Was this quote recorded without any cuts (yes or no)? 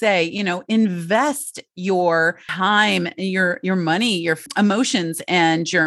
no